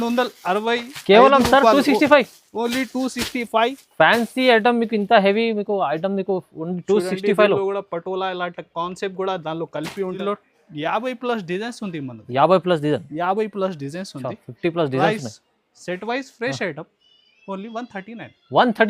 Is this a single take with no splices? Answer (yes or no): no